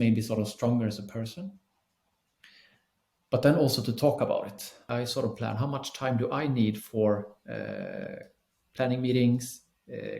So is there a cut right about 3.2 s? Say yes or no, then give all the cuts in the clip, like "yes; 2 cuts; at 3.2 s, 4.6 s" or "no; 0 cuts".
no; 1 cut; at 4.9 s